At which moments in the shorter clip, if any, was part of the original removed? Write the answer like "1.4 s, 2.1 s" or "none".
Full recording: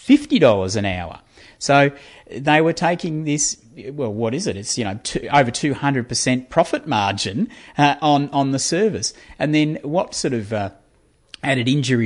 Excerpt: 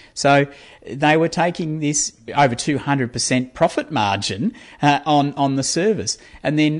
2.2 s